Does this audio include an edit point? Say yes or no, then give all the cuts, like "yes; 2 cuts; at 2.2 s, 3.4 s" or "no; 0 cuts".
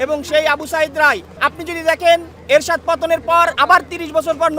yes; 2 cuts; at 1.3 s, 3.5 s